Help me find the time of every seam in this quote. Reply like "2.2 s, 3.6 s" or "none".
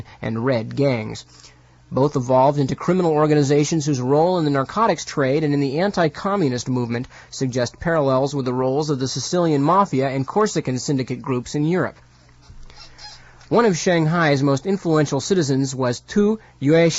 9.8 s

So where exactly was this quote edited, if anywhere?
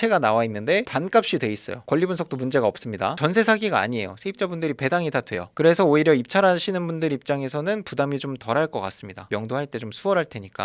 3.2 s

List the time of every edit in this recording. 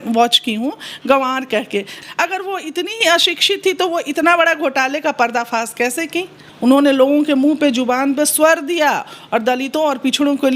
1.9 s, 6.4 s

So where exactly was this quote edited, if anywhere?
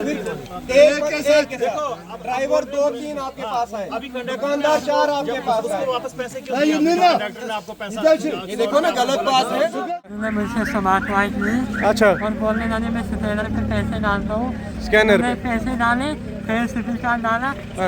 10.3 s

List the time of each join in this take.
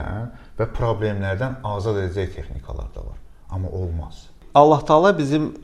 4.4 s

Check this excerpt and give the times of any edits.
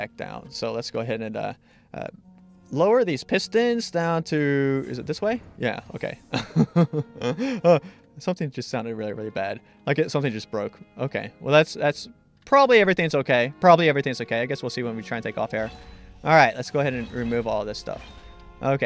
none

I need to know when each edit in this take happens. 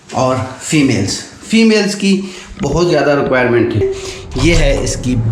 3.8 s

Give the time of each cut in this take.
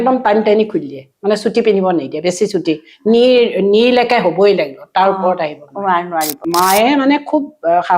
6.4 s

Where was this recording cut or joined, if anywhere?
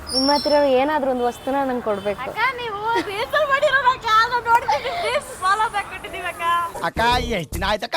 6.7 s

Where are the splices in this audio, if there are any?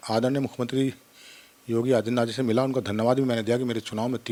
none

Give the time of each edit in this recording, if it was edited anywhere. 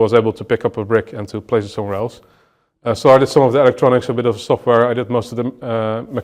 none

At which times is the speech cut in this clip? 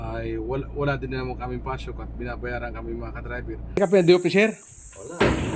3.8 s

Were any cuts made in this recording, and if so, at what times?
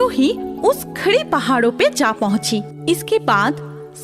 2.7 s

